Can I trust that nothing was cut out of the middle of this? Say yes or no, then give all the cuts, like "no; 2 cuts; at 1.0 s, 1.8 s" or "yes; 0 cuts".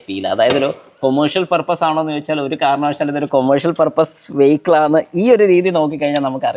yes; 0 cuts